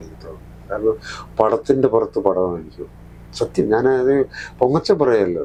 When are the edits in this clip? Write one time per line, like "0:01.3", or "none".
none